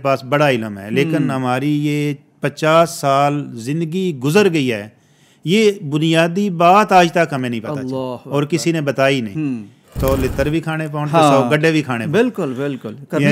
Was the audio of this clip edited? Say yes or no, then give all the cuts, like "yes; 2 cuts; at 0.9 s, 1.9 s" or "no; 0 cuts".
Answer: yes; 1 cut; at 9.9 s